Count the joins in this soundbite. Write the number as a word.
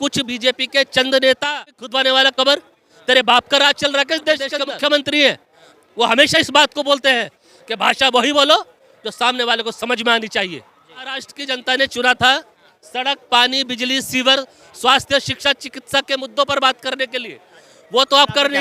three